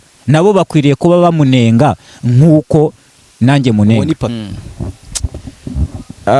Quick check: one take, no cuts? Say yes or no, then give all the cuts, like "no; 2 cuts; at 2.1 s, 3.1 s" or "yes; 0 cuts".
no; 1 cut; at 4.4 s